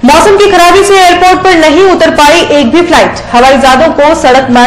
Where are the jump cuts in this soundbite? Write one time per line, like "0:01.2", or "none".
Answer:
none